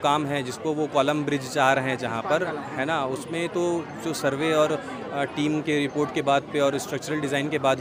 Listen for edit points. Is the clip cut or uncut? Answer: uncut